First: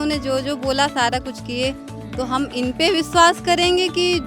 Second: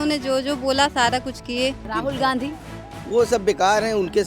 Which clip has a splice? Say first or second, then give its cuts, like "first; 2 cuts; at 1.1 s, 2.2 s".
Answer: second; 1 cut; at 1.8 s